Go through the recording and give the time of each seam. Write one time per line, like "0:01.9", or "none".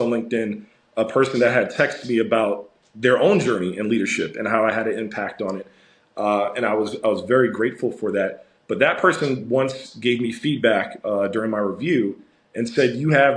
none